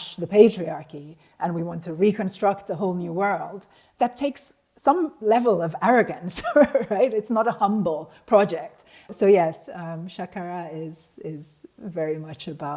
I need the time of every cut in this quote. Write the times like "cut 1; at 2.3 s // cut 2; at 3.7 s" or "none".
cut 1; at 3.8 s // cut 2; at 9.1 s